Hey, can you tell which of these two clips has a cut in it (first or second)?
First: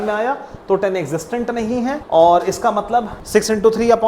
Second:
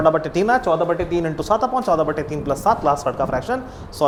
first